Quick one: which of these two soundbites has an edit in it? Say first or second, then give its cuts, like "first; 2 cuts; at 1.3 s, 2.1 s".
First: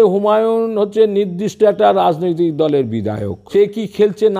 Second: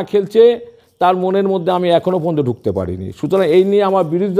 first; 1 cut; at 3.3 s